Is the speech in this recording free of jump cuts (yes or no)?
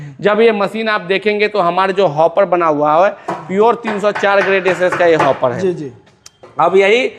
yes